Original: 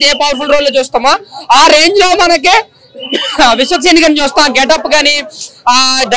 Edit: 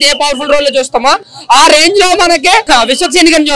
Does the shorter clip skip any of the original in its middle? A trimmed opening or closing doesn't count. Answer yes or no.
yes